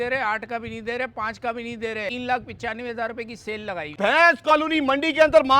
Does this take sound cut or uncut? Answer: cut